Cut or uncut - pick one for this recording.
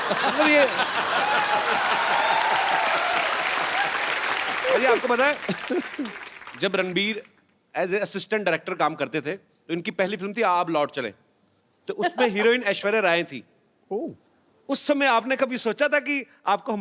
cut